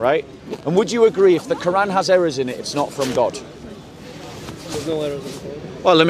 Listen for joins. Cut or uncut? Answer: uncut